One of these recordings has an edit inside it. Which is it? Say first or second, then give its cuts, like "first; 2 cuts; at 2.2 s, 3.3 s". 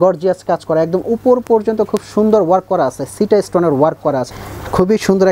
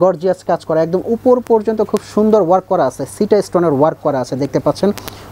first; 1 cut; at 4.3 s